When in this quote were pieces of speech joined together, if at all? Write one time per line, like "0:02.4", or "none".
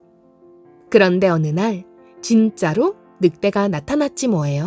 0:00.9